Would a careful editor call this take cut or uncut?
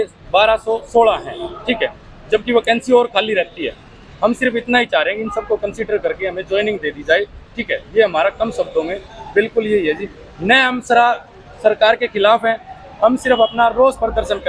uncut